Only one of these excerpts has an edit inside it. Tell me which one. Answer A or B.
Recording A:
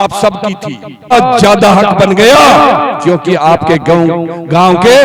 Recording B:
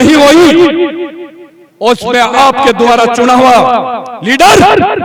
A